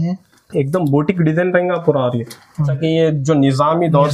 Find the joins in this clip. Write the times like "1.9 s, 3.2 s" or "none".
2.8 s